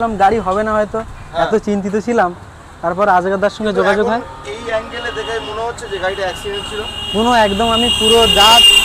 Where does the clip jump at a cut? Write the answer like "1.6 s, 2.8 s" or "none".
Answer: none

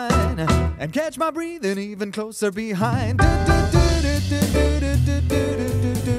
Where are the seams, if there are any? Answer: none

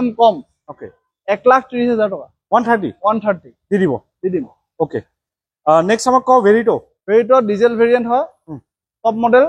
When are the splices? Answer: none

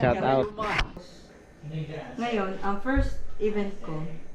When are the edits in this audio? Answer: 1.0 s

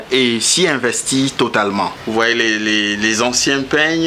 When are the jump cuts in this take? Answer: 2.0 s

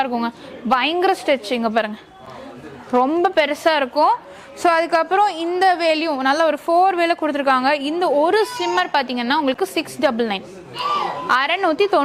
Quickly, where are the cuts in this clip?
none

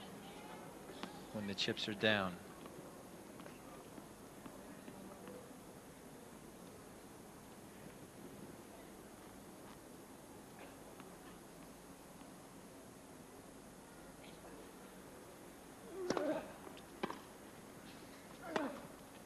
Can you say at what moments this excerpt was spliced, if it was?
4.8 s

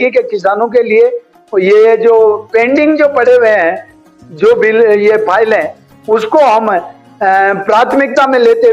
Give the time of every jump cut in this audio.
none

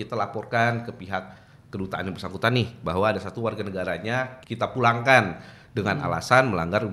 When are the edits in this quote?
4.4 s

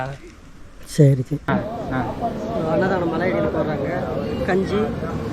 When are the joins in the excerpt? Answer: 1.5 s

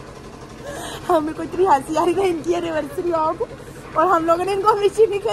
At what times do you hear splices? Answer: none

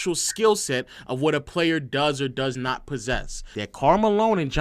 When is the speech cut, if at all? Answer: 3.4 s

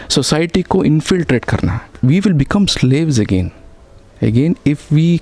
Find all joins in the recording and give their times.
1.9 s

